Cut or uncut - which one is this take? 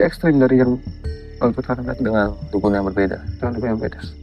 uncut